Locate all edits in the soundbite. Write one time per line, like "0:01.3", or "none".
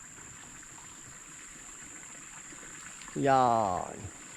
0:01.3

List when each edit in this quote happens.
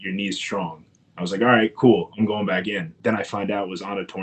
0:02.9

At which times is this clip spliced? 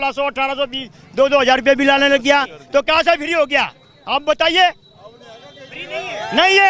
none

